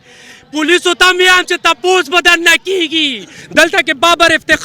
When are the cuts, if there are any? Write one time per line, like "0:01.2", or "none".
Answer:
0:03.3